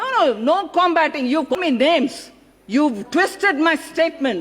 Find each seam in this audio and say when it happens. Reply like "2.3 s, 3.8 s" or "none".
1.5 s